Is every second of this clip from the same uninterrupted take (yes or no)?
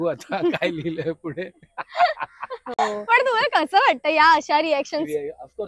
yes